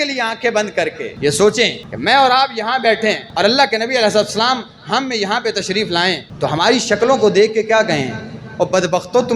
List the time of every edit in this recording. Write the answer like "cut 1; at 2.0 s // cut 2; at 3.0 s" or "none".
cut 1; at 1.0 s // cut 2; at 1.9 s // cut 3; at 3.3 s // cut 4; at 6.3 s